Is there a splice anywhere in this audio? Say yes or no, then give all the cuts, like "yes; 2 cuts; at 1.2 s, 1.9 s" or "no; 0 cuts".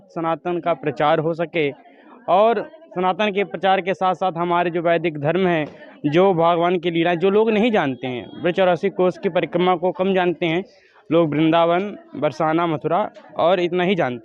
no; 0 cuts